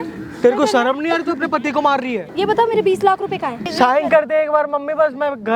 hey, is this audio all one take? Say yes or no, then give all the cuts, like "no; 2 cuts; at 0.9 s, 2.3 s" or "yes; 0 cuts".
no; 2 cuts; at 2.3 s, 3.6 s